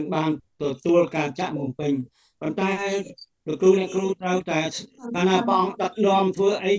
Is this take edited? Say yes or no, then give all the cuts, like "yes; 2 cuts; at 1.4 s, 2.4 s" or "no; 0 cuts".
no; 0 cuts